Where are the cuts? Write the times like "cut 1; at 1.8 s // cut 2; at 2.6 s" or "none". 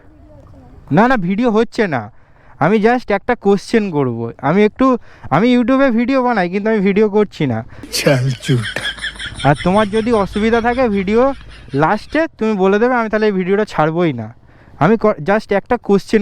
none